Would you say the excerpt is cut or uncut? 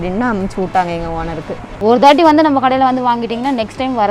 cut